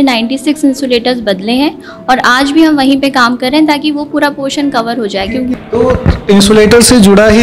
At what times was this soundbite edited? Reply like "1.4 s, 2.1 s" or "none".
5.5 s